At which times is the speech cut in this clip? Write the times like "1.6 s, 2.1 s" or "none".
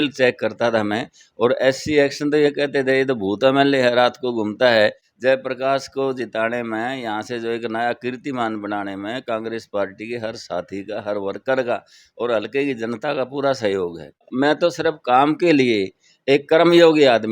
5.0 s, 14.3 s